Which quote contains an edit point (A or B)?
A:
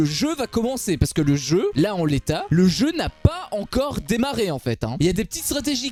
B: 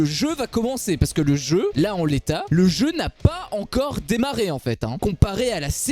B